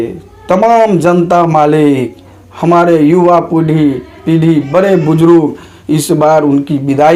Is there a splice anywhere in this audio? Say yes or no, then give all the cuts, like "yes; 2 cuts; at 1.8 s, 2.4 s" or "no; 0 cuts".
no; 0 cuts